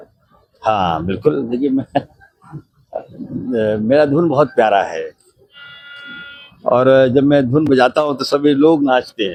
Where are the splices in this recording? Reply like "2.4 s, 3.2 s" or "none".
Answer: none